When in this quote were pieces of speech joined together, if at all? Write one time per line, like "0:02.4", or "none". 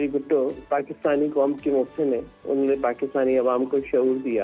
none